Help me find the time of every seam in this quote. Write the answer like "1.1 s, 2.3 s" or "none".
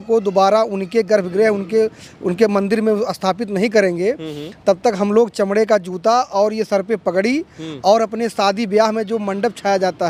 none